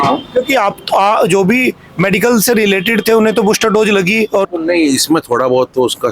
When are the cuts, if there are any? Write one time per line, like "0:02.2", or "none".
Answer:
0:04.4

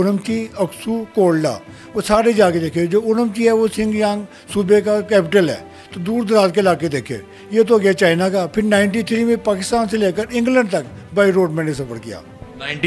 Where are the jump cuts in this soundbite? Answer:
none

